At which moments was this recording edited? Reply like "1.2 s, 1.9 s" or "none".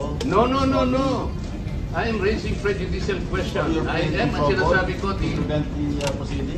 none